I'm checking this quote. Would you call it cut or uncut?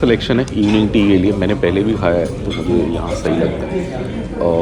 uncut